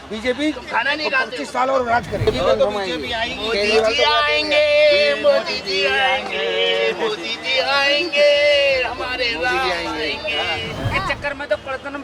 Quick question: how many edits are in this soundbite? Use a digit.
2